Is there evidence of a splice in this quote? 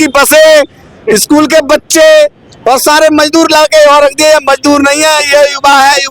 no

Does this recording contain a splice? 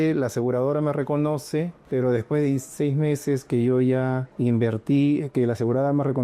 yes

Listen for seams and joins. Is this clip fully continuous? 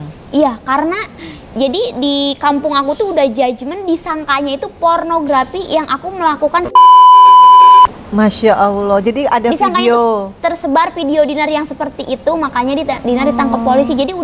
yes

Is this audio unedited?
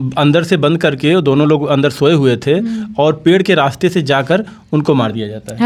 yes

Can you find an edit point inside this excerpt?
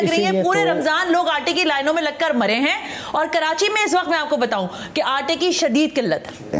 no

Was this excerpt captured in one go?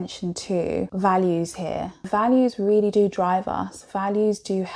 no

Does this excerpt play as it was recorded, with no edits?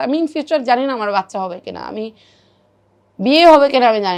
yes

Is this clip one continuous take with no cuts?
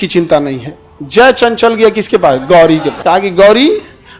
no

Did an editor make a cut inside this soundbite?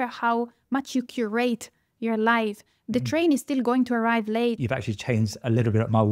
yes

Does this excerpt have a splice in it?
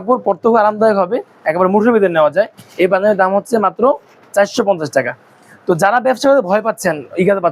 no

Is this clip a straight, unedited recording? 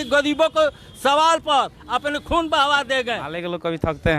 no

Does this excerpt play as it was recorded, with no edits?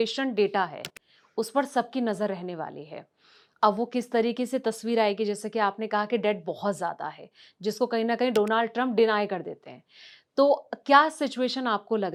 yes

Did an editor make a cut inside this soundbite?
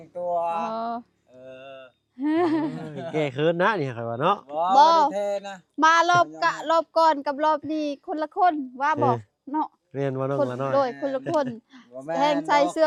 no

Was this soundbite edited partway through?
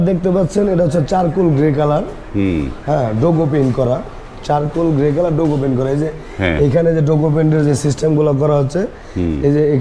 no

